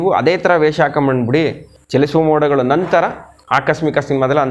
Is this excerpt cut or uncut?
cut